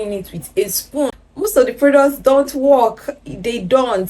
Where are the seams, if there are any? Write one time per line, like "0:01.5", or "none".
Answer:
0:01.2